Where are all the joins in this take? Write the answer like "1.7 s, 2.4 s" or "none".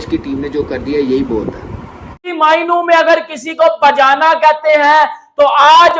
2.3 s